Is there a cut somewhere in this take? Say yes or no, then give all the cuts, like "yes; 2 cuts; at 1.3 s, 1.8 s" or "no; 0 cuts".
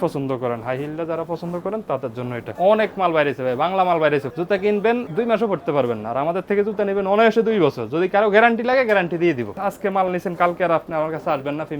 yes; 4 cuts; at 2.5 s, 4.3 s, 5.1 s, 9.6 s